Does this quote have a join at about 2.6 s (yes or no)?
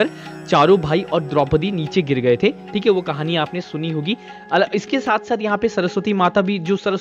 no